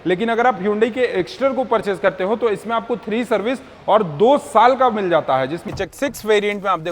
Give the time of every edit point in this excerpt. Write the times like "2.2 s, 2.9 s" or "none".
5.7 s